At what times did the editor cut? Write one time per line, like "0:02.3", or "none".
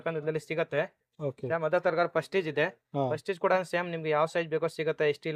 none